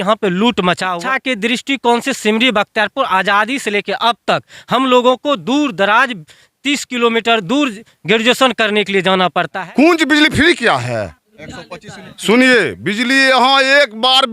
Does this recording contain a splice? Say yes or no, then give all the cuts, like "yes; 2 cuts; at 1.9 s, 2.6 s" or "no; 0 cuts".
yes; 2 cuts; at 0.9 s, 9.6 s